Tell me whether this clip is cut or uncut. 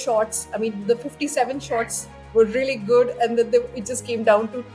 uncut